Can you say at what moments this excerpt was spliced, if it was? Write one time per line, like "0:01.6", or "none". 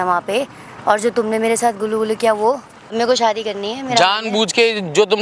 0:02.9